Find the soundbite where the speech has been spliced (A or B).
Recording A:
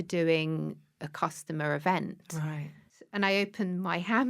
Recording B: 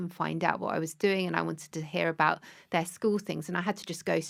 A